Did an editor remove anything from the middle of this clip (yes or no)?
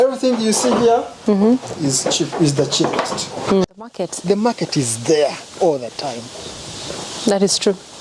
yes